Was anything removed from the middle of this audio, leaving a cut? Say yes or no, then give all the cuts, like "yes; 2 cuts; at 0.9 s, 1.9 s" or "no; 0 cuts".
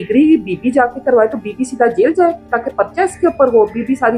no; 0 cuts